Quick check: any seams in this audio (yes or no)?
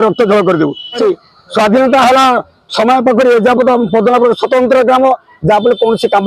yes